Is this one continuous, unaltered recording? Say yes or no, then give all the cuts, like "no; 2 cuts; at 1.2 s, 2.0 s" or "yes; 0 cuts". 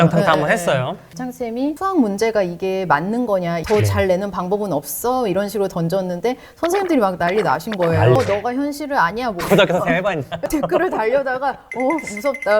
no; 4 cuts; at 1.1 s, 3.6 s, 8.2 s, 10.5 s